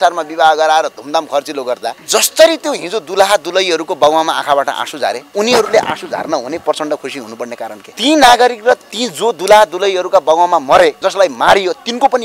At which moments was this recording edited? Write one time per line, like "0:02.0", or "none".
0:01.9
0:05.2
0:07.8
0:11.0